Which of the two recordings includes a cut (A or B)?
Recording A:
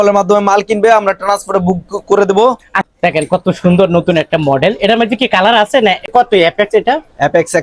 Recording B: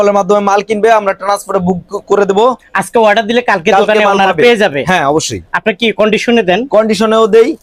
A